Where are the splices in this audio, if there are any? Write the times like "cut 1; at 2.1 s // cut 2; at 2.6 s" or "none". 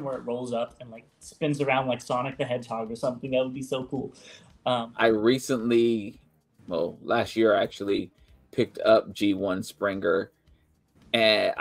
cut 1; at 4.7 s